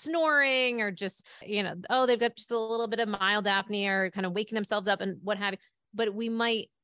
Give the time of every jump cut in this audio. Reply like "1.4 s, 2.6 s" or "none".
1.4 s